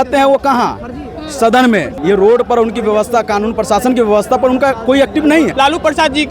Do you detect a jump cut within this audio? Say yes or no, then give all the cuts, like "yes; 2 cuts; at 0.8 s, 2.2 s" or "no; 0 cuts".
yes; 2 cuts; at 1.9 s, 5.5 s